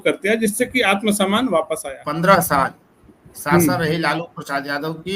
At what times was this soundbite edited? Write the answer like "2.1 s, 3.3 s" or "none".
1.9 s